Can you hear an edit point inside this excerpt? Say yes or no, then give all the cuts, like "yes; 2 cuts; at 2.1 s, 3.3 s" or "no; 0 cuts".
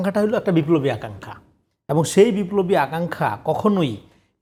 no; 0 cuts